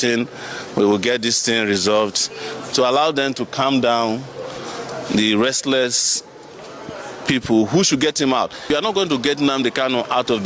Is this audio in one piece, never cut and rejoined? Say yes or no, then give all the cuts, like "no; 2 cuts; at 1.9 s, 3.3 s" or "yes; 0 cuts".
no; 1 cut; at 8.8 s